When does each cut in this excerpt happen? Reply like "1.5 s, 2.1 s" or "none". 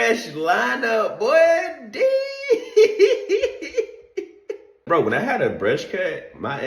4.8 s